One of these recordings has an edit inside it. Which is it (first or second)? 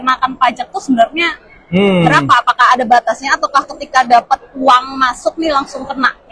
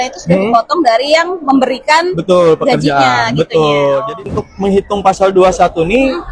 second